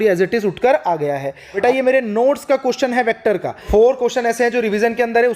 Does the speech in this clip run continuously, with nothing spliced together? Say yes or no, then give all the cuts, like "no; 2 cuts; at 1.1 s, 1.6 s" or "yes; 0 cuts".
no; 2 cuts; at 1.6 s, 3.6 s